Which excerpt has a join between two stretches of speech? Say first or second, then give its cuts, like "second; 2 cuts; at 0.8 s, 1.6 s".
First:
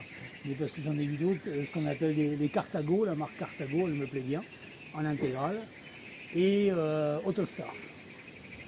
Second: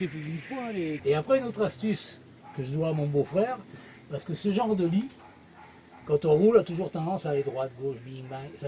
second; 1 cut; at 1.0 s